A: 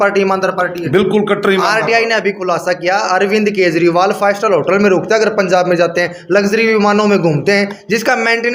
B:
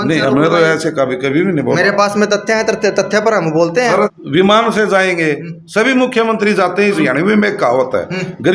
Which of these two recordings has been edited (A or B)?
B